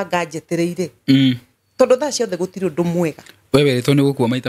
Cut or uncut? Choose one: uncut